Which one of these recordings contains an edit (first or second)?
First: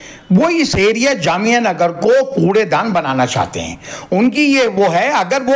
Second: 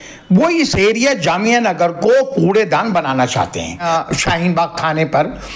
second